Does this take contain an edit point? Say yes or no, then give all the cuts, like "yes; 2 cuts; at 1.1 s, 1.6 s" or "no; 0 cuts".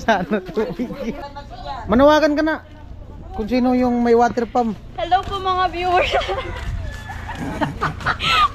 yes; 1 cut; at 1.3 s